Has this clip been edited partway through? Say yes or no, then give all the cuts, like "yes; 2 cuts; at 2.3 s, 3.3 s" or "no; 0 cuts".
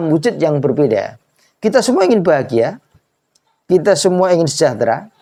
no; 0 cuts